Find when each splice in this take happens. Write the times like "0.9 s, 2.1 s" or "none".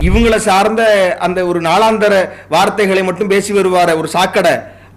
none